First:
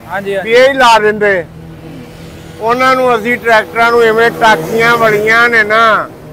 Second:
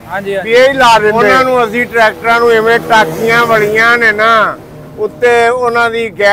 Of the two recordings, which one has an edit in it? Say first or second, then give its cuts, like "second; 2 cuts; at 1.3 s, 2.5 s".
second; 1 cut; at 1.4 s